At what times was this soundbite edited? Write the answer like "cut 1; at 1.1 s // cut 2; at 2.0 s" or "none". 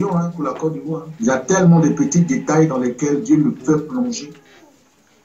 cut 1; at 1.1 s